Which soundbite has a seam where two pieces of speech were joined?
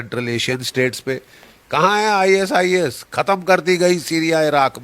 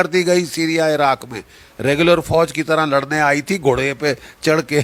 first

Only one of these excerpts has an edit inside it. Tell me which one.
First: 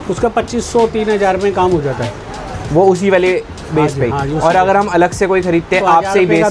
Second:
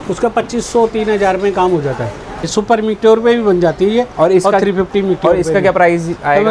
second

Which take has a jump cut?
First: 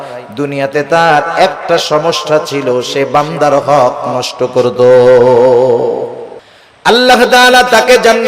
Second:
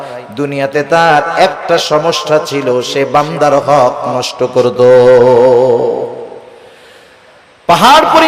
first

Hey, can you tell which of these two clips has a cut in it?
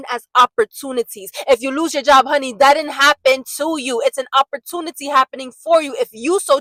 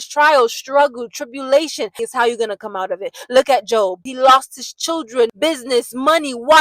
second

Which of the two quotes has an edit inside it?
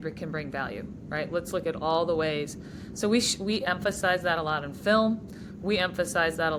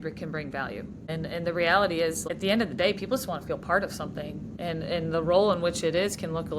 second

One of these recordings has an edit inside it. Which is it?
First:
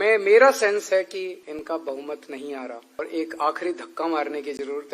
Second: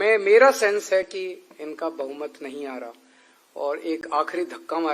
first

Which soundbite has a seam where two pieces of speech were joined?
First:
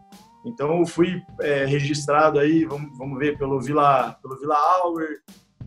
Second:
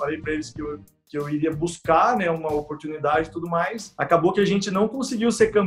second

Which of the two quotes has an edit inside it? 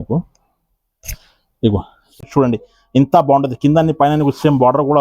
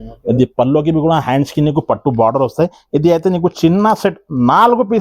first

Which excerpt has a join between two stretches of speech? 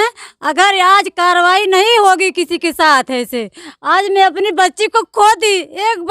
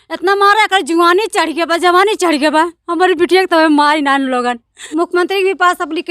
second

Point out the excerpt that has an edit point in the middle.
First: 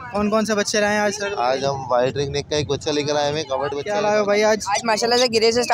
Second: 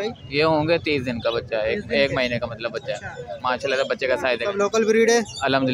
first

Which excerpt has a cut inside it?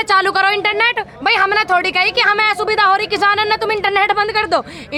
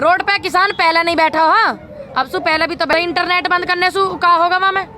second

